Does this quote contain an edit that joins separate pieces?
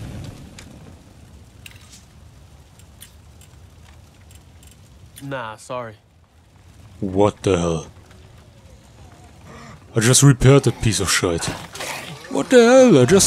no; 0 cuts

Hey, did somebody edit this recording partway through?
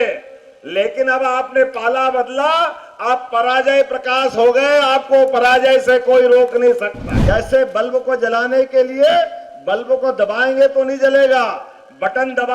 yes; 1 cut; at 7.1 s

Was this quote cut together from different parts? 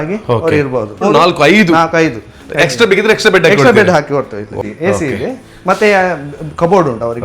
yes; 2 cuts; at 1.0 s, 4.6 s

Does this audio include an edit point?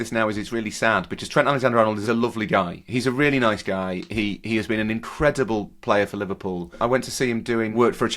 yes; 2 cuts; at 2.0 s, 6.7 s

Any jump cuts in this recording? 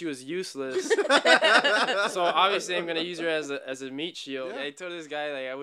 yes; 1 cut; at 4.5 s

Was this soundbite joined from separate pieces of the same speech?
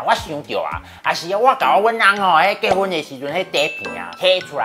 no; 0 cuts

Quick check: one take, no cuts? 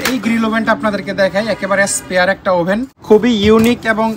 no; 1 cut; at 2.9 s

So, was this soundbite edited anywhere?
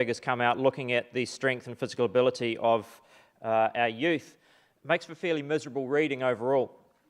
yes; 1 cut; at 2.1 s

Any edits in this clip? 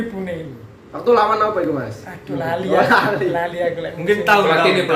no; 0 cuts

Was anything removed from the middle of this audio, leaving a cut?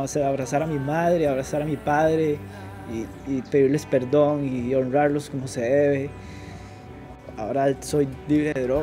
no; 0 cuts

